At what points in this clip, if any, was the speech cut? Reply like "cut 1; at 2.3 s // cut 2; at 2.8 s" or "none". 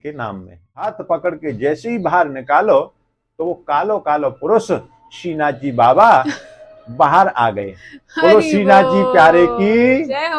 cut 1; at 1.0 s